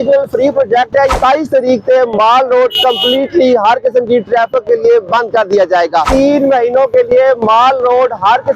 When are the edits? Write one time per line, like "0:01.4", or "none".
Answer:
0:01.1
0:06.1